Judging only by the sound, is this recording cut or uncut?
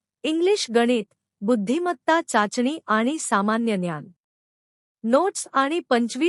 uncut